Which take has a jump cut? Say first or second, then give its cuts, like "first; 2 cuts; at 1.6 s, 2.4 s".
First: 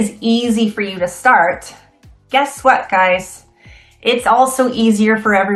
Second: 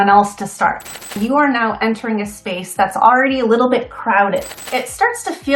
second; 2 cuts; at 1.2 s, 4.6 s